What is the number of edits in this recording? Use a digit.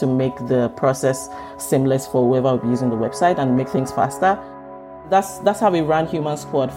1